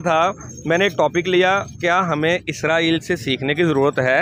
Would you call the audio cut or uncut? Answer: uncut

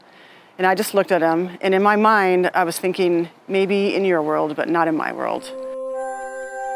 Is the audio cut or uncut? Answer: cut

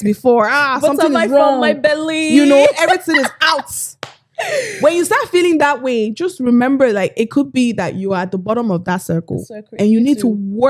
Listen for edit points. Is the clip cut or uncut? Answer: uncut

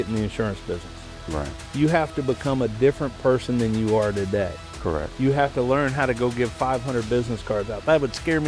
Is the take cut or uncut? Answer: uncut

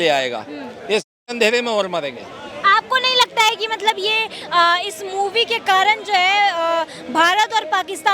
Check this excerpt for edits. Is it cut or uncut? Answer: uncut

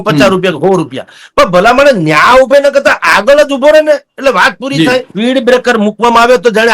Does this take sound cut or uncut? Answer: cut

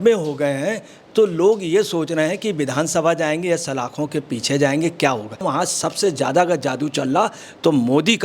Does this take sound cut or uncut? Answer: cut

